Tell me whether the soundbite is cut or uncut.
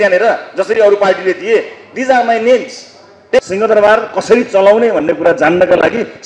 cut